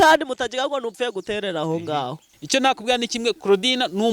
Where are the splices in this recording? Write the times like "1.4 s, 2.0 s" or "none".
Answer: 2.3 s

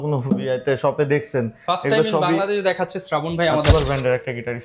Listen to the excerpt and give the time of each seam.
3.7 s

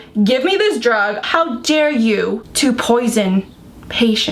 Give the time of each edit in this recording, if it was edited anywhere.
1.2 s, 2.5 s

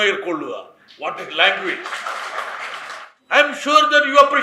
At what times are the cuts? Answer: 3.1 s

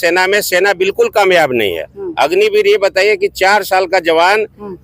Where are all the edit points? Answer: none

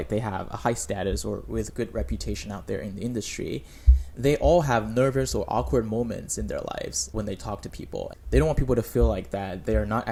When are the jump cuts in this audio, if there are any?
none

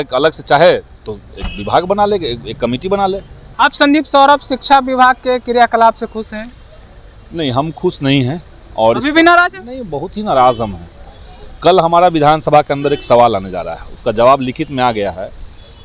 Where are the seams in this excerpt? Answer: 3.4 s

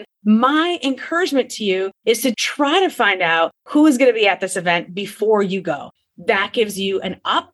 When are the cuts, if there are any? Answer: 2.4 s, 5.9 s

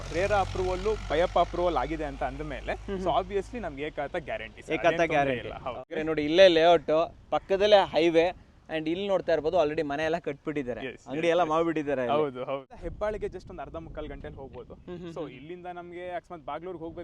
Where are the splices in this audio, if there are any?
6.0 s, 12.7 s

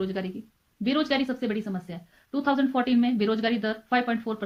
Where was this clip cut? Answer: none

